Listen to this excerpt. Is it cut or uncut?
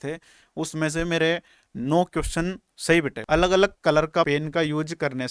cut